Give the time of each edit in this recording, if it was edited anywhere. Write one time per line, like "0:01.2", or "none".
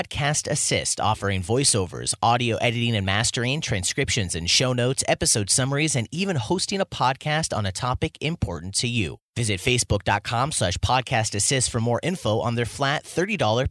none